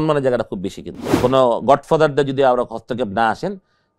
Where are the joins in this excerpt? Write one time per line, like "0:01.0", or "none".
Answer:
0:01.1